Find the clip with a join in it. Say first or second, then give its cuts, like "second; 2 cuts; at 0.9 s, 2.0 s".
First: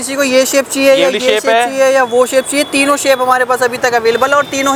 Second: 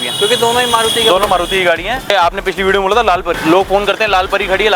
second; 2 cuts; at 2.1 s, 3.3 s